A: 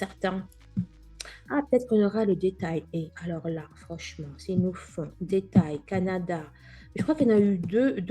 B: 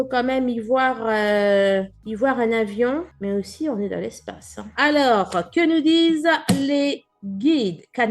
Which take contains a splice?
B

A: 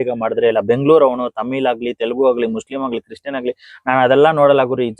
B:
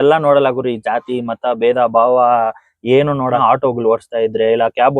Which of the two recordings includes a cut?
B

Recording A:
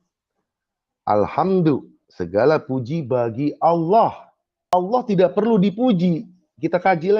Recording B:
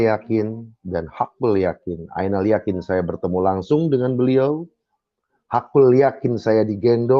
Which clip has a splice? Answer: A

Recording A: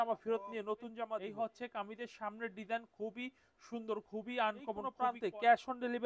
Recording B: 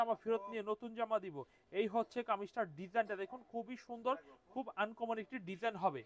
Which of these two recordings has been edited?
A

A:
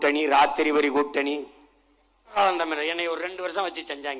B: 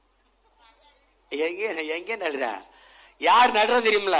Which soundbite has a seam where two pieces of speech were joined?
A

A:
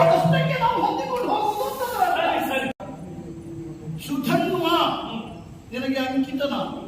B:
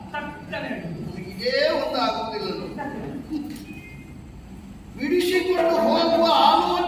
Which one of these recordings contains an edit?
A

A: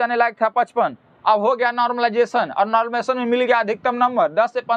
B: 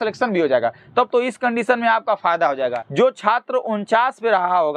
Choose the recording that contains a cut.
B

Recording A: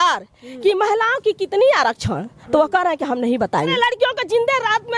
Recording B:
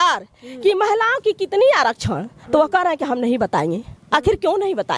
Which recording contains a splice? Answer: A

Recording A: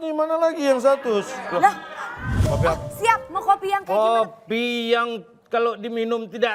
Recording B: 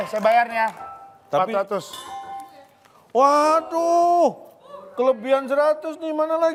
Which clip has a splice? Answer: A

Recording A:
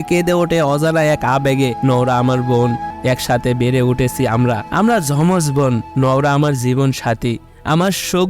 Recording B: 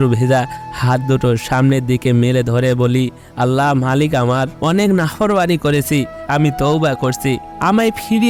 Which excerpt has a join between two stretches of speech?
A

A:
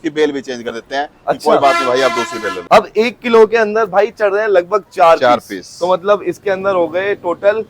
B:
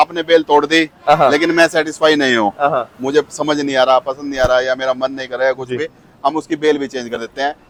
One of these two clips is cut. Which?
A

